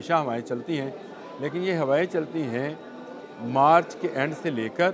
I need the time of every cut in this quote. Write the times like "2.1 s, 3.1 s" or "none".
none